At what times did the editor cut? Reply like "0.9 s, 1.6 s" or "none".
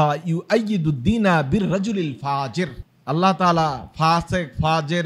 2.9 s